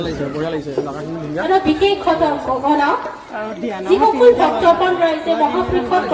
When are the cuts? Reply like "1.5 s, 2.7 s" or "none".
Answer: none